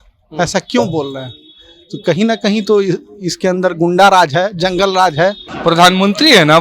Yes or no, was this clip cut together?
yes